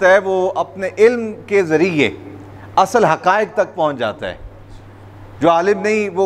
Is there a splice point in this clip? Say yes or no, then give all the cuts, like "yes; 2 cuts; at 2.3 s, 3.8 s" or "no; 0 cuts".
no; 0 cuts